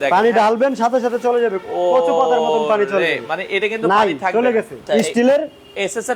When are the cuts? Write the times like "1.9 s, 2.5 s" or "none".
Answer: 4.8 s